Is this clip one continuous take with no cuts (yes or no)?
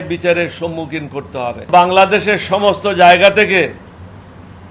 no